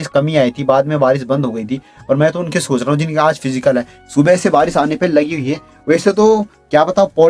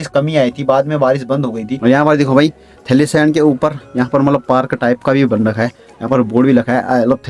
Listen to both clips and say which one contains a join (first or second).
second